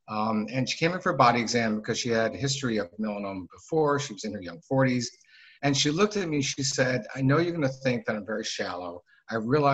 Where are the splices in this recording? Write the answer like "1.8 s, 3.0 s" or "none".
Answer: none